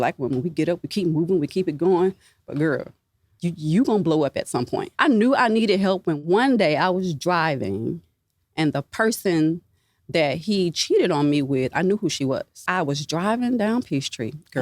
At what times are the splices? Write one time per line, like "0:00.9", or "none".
0:03.3
0:04.8
0:06.2
0:12.6